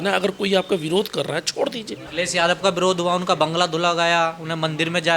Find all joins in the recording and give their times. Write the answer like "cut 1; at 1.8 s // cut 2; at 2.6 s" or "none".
cut 1; at 2.0 s